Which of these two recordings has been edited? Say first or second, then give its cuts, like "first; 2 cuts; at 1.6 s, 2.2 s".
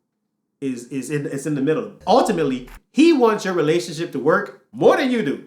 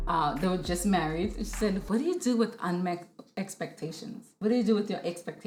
first; 1 cut; at 2.0 s